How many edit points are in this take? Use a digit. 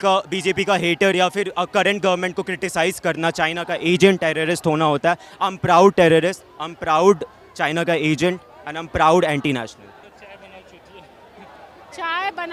1